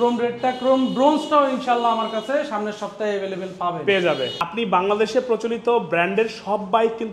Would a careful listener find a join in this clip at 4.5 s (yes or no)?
yes